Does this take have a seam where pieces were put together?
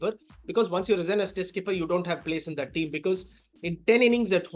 no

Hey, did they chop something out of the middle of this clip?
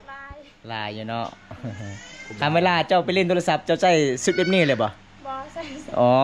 no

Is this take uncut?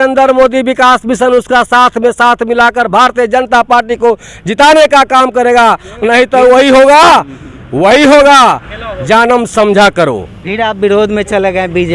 yes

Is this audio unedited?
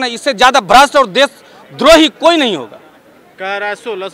yes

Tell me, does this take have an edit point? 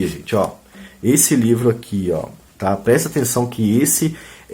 yes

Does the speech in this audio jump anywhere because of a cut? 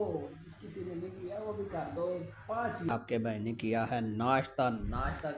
yes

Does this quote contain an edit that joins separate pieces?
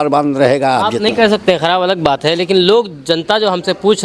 no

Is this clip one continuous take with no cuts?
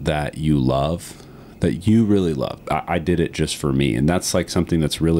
no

